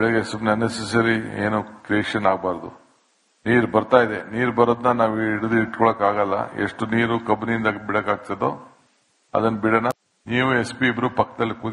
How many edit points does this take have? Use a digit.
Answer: 1